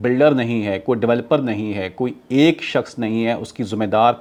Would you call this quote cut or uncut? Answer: uncut